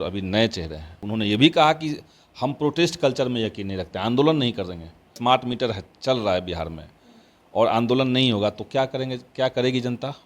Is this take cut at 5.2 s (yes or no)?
yes